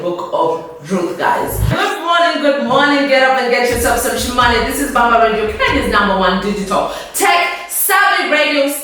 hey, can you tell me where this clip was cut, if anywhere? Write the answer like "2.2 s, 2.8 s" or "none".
1.8 s